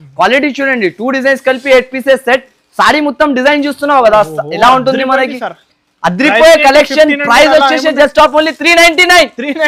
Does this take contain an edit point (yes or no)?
no